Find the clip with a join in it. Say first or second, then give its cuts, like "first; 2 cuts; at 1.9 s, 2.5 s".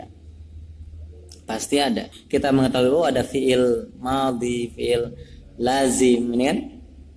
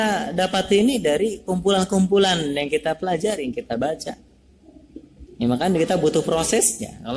first; 1 cut; at 2.1 s